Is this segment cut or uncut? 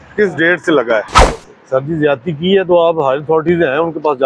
cut